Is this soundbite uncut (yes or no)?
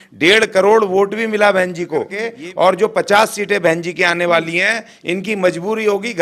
no